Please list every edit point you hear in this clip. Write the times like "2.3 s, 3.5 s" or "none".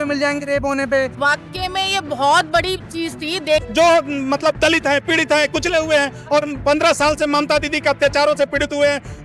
1.1 s, 3.7 s